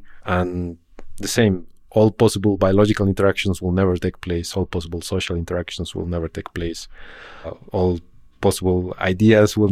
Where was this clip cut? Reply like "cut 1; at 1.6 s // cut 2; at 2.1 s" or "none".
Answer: none